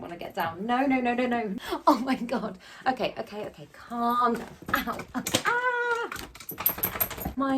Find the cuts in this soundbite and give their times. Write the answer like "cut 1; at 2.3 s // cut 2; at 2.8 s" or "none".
cut 1; at 1.5 s